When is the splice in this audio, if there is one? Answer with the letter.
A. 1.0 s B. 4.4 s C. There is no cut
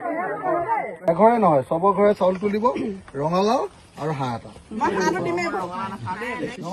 A